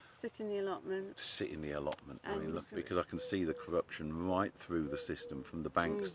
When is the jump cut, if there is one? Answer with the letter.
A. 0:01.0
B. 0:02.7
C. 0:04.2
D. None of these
B